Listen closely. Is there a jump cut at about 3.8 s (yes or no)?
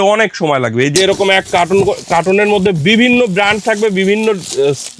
no